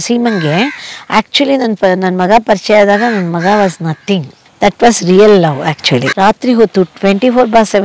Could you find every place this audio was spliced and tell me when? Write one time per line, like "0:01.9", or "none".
0:06.1